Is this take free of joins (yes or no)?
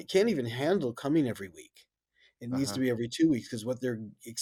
yes